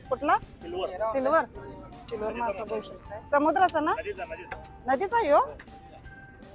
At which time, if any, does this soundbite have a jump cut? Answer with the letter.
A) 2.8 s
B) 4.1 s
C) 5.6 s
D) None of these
D